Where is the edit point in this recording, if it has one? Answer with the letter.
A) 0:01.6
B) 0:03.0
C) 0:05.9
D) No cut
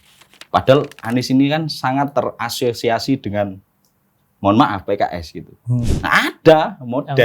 C